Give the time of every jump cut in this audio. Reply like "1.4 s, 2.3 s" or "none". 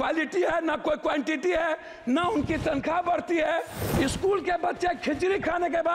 3.8 s